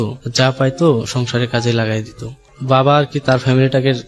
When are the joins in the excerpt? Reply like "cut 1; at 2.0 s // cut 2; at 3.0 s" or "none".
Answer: cut 1; at 2.5 s

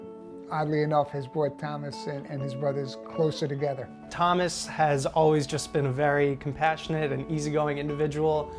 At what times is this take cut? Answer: none

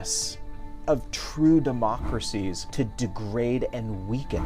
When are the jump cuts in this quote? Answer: cut 1; at 2.6 s

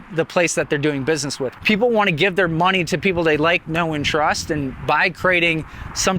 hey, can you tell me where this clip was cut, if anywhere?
cut 1; at 1.4 s

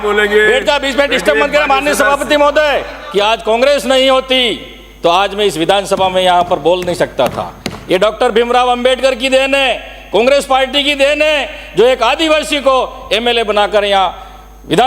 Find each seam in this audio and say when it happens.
cut 1; at 3.0 s

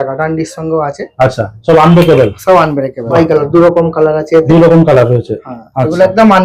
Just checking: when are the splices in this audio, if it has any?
cut 1; at 3.0 s

